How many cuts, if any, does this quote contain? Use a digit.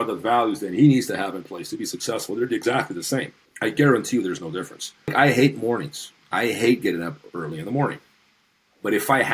2